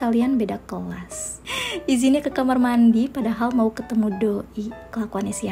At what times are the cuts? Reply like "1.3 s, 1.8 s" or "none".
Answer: none